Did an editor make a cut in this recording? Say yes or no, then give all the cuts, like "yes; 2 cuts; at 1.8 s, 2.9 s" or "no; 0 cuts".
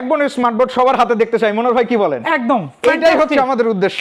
no; 0 cuts